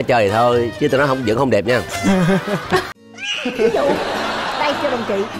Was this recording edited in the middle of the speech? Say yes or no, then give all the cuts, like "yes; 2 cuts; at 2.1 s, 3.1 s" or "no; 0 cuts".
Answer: yes; 1 cut; at 2.9 s